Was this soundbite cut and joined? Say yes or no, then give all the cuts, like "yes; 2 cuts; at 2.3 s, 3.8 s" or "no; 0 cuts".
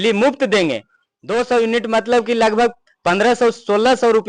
no; 0 cuts